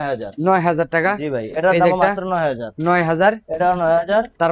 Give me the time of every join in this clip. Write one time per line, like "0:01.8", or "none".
none